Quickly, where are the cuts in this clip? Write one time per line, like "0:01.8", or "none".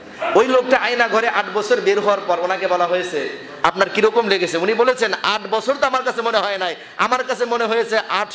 none